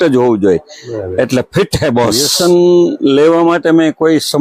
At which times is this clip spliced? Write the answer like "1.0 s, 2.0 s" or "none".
2.3 s